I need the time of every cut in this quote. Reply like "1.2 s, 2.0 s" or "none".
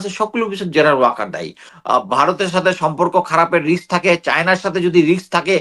1.7 s